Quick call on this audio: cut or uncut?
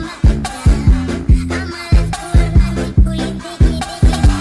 uncut